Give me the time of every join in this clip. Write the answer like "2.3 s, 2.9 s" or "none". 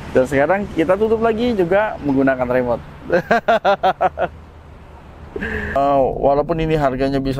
5.8 s